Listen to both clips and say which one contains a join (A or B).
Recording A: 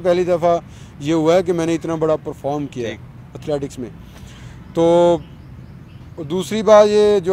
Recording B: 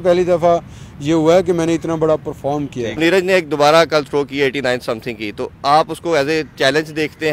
B